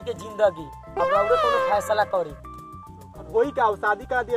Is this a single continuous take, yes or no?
no